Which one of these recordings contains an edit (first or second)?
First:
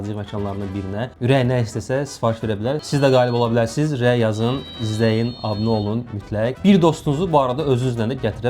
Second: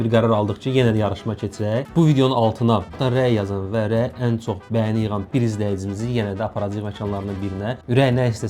first